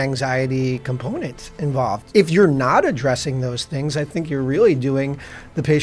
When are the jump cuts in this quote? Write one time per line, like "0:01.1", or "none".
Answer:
0:02.0